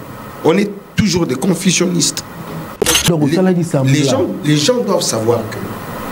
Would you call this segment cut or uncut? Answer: cut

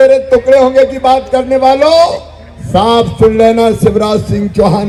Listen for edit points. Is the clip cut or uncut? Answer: uncut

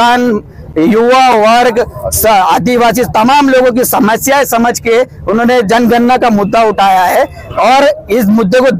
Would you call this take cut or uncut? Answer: uncut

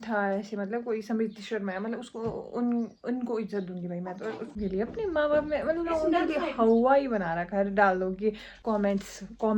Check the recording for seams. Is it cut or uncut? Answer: cut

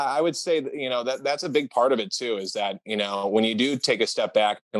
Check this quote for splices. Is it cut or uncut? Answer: uncut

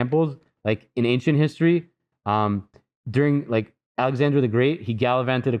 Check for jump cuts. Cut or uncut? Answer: uncut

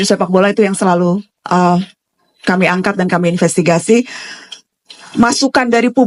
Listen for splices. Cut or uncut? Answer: uncut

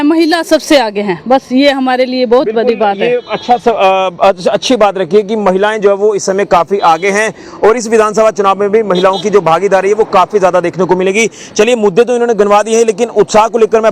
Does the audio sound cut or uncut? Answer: uncut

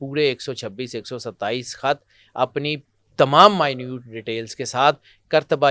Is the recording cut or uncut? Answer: uncut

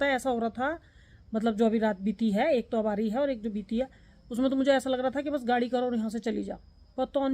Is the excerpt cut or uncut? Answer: uncut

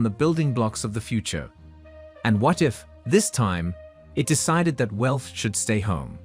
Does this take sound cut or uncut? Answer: uncut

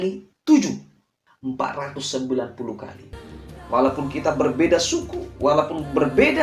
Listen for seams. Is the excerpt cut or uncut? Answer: cut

